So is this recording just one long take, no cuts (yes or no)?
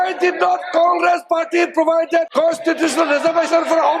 no